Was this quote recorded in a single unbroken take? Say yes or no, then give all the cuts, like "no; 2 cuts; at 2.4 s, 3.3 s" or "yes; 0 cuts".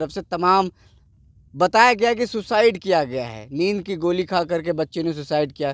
yes; 0 cuts